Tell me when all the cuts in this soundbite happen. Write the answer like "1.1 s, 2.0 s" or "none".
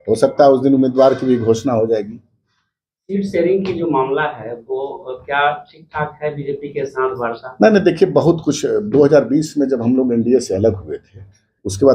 none